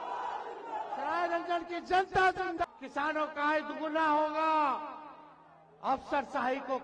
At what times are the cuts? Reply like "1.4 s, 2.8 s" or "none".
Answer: 2.6 s